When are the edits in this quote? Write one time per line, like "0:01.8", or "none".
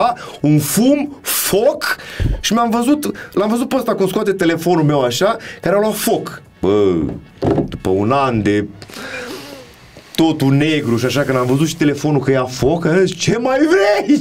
none